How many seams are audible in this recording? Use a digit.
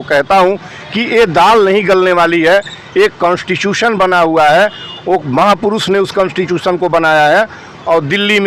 0